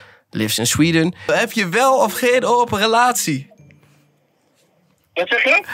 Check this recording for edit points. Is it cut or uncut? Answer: cut